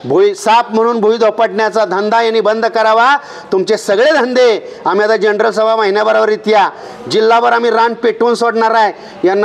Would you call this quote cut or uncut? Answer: uncut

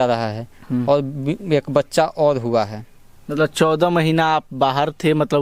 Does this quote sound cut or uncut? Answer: uncut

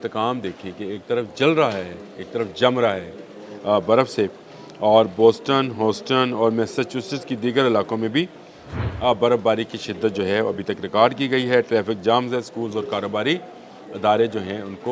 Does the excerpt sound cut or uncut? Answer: uncut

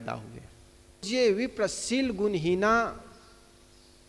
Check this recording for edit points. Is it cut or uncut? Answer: cut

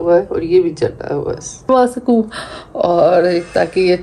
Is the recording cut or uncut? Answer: cut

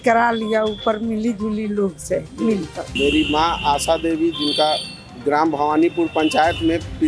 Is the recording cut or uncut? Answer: cut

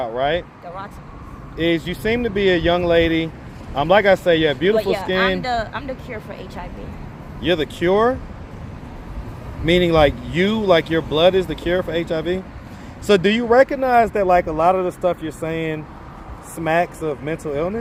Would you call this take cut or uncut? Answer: uncut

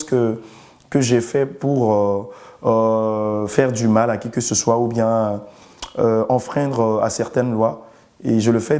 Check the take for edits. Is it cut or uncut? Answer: uncut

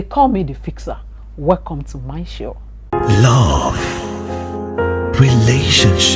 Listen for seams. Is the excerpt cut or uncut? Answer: cut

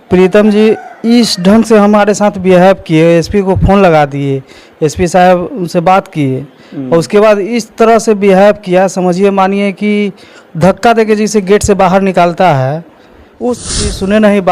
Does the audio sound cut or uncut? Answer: cut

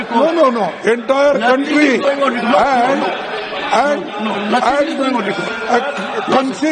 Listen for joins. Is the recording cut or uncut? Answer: uncut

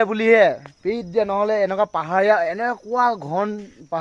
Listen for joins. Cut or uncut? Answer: uncut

